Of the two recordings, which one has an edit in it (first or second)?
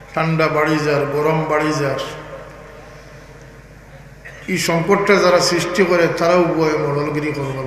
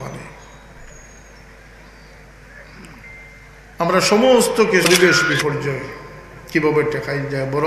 second